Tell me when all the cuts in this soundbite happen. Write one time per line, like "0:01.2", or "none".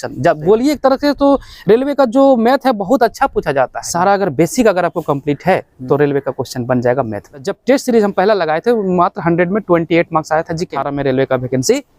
0:03.8
0:07.5
0:10.7